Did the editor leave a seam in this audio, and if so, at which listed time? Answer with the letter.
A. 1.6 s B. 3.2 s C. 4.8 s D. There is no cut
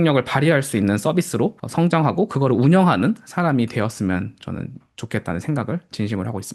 A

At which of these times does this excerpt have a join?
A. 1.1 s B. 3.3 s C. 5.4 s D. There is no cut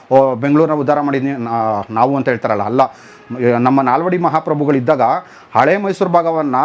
D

